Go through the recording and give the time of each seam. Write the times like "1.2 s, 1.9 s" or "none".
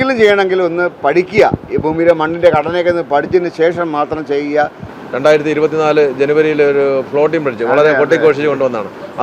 5.0 s